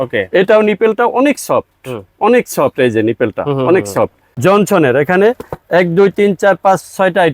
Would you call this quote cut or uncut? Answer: cut